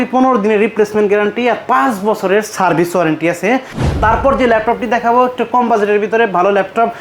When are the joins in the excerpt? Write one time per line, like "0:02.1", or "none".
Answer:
0:03.8